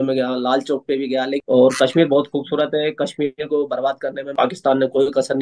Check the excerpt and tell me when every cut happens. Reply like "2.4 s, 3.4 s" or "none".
4.4 s